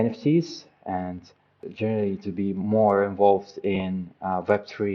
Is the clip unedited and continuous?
no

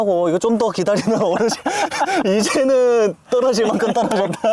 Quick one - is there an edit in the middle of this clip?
no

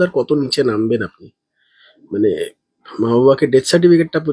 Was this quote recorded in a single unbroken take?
yes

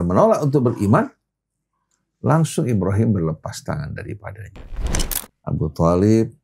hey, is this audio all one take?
no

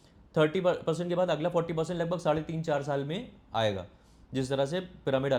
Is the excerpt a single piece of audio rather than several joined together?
yes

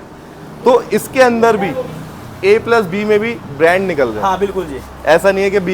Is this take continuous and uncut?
yes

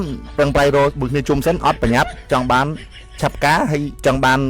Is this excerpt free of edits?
yes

